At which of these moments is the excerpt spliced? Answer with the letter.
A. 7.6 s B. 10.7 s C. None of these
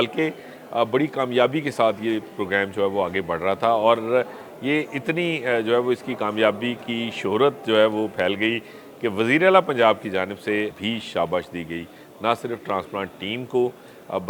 B